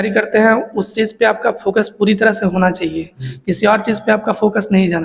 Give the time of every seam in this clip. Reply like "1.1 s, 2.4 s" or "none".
none